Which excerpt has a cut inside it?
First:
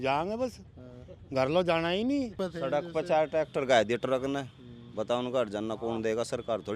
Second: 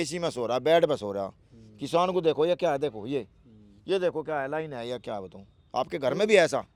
first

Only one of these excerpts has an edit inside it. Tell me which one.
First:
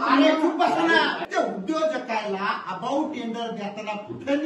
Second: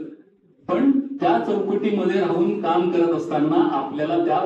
first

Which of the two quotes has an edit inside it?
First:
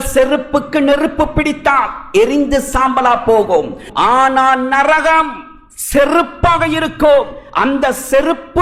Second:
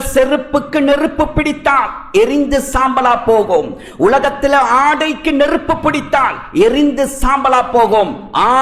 first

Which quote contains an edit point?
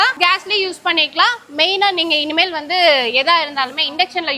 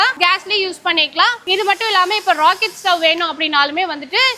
second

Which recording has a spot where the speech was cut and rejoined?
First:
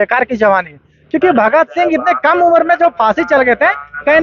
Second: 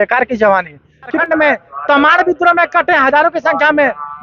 second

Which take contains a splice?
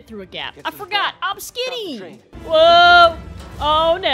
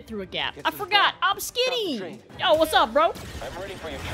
second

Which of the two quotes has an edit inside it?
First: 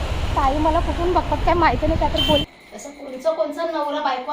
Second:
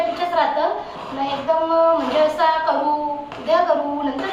first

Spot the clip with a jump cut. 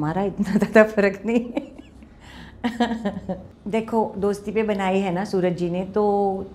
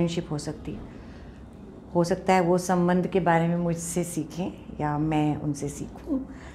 first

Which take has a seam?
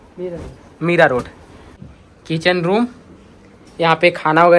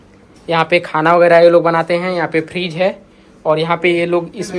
first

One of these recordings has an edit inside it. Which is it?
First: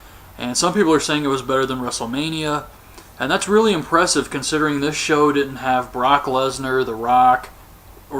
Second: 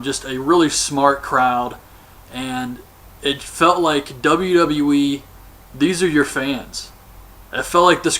second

